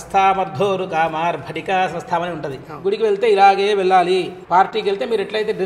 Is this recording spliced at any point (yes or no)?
yes